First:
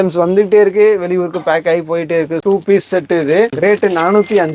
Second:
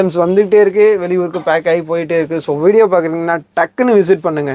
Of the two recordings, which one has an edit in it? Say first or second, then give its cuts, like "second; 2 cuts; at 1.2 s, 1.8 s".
first; 2 cuts; at 2.4 s, 3.5 s